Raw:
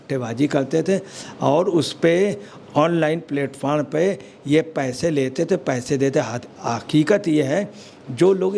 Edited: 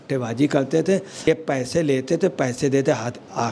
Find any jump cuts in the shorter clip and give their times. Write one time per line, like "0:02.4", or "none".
0:01.3